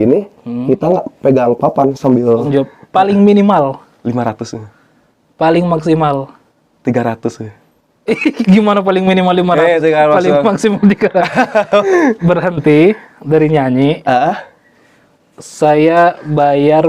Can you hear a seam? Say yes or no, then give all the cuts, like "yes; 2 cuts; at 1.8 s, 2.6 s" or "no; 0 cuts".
yes; 2 cuts; at 2.5 s, 11.9 s